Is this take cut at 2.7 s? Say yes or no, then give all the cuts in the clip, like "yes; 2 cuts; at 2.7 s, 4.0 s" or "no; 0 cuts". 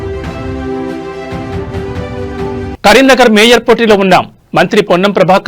no; 0 cuts